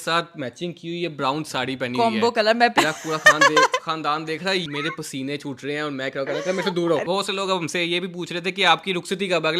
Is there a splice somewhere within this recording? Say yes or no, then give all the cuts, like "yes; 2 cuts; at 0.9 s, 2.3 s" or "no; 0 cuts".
yes; 3 cuts; at 2.7 s, 4.6 s, 7.0 s